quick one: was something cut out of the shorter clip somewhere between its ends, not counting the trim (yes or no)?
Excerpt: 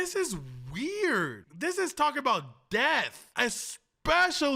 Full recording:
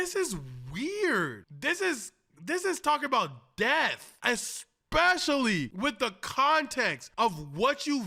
yes